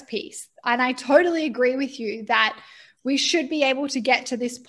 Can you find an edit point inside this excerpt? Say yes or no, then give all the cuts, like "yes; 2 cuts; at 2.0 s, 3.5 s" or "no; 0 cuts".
no; 0 cuts